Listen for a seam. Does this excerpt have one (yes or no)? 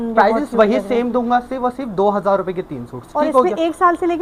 no